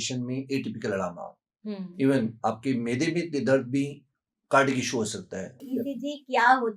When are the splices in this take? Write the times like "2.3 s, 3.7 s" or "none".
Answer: 5.7 s